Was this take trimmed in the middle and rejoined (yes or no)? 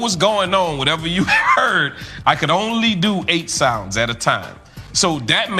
no